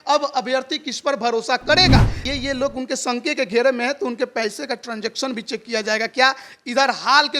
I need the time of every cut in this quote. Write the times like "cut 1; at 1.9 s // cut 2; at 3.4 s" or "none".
cut 1; at 2.2 s

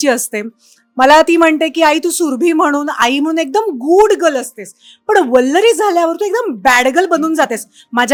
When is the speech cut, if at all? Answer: none

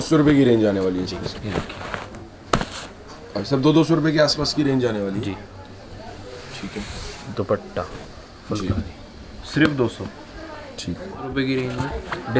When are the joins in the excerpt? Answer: none

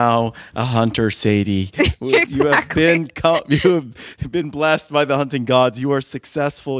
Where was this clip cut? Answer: none

